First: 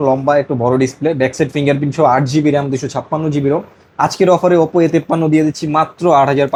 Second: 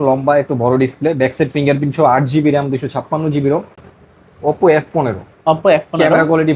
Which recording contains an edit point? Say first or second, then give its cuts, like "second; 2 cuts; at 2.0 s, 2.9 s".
second; 1 cut; at 3.8 s